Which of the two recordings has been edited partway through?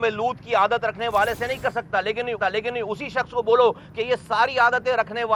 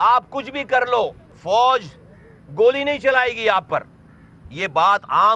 second; 1 cut; at 1.3 s

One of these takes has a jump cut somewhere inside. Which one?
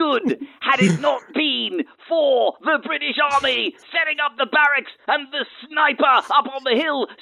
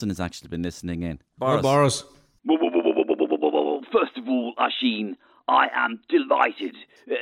second; 2 cuts; at 1.3 s, 2.2 s

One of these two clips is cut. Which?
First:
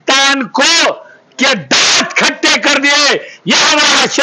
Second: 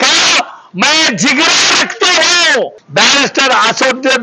second; 1 cut; at 2.8 s

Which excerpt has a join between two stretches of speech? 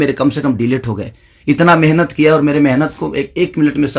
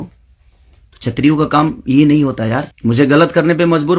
second; 1 cut; at 2.7 s

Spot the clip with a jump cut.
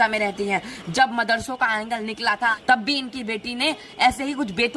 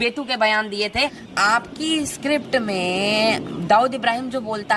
second; 1 cut; at 1.2 s

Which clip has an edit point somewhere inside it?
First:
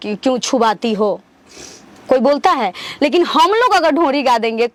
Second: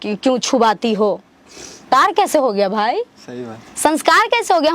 second; 1 cut; at 1.8 s

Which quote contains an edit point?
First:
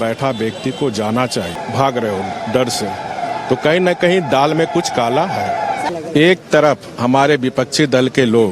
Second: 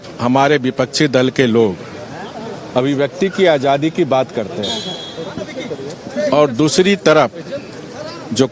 first; 2 cuts; at 1.5 s, 5.9 s

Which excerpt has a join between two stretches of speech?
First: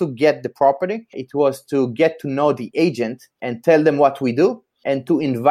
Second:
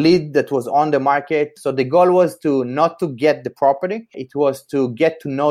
second; 1 cut; at 1.6 s

